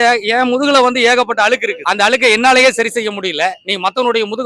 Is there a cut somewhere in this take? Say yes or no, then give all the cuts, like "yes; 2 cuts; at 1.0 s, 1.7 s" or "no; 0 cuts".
no; 0 cuts